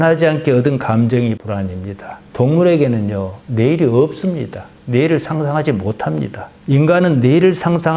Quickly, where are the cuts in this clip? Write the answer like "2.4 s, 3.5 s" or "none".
1.4 s